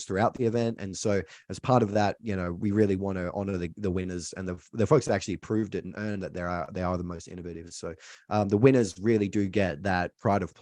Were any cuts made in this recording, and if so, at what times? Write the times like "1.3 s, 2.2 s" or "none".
8.1 s

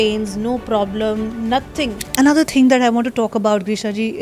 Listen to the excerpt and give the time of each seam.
2.0 s

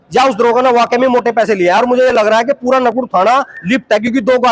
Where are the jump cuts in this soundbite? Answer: none

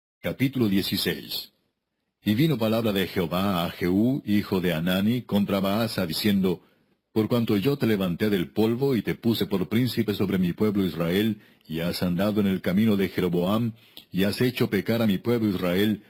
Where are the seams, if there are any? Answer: none

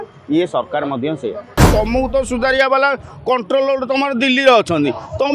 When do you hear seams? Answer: 1.7 s

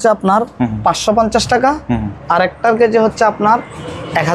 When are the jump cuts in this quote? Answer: none

